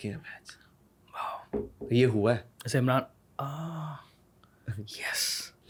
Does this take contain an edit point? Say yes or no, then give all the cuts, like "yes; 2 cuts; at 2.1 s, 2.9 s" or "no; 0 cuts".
no; 0 cuts